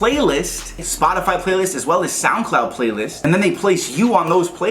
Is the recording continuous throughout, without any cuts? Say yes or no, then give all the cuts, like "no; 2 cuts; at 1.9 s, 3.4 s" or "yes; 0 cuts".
no; 1 cut; at 3.1 s